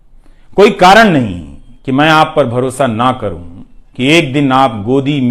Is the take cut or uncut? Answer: uncut